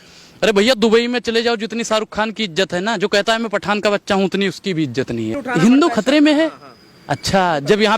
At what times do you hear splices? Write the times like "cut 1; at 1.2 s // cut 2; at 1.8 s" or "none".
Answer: cut 1; at 5.4 s